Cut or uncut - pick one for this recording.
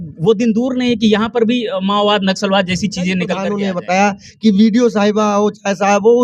cut